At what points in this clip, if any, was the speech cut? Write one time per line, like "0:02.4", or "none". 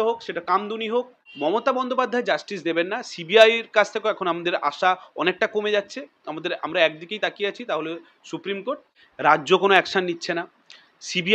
0:01.2
0:09.0